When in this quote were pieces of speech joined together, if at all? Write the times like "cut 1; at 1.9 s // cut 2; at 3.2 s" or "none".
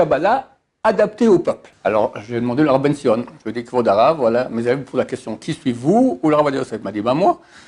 cut 1; at 1.7 s